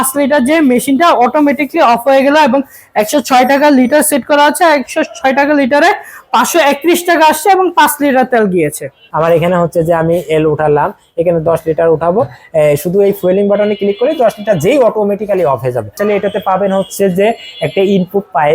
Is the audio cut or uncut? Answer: cut